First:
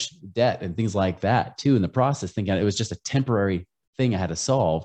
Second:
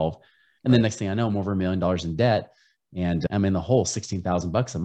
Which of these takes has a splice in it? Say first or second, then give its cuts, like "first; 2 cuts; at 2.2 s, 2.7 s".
second; 1 cut; at 3.3 s